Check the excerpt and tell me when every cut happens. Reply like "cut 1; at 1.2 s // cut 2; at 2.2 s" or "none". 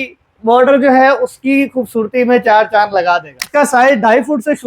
cut 1; at 3.4 s